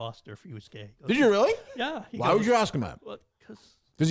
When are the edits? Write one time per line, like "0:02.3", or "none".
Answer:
0:03.0